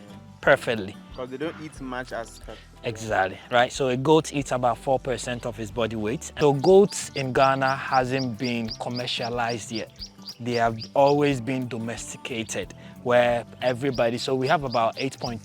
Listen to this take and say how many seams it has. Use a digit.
1